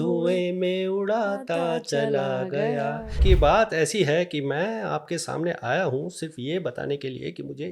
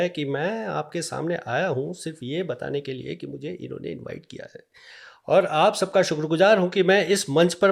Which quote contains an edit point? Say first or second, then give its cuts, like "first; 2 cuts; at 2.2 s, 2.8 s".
first; 1 cut; at 3.2 s